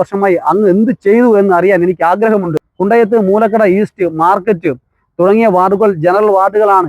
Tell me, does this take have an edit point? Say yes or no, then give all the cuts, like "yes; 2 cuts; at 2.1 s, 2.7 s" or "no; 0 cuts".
yes; 1 cut; at 2.6 s